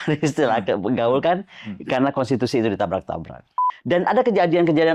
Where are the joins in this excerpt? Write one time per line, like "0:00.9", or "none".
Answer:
0:03.6